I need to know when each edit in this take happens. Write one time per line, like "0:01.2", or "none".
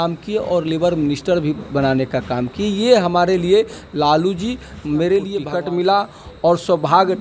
0:05.5